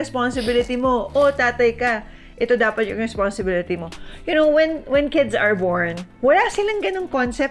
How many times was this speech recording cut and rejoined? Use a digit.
0